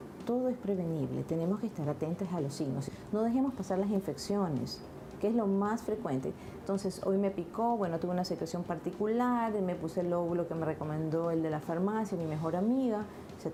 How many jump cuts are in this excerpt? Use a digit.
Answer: 0